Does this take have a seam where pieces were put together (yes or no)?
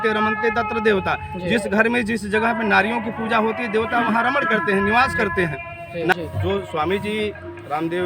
yes